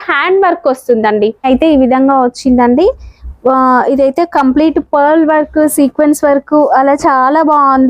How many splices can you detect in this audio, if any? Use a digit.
1